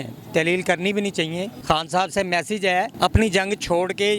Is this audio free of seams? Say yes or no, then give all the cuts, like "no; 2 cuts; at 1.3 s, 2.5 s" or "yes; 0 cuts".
no; 2 cuts; at 1.5 s, 2.9 s